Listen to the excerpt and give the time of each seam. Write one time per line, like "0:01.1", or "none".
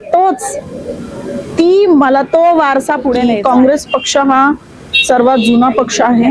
0:03.3